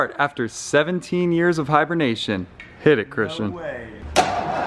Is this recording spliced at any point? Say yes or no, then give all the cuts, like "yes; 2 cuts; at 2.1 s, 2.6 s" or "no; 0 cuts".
no; 0 cuts